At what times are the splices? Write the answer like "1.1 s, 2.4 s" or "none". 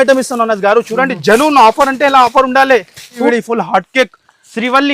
3.2 s